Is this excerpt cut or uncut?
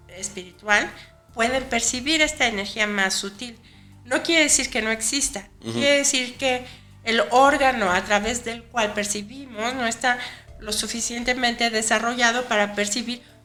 uncut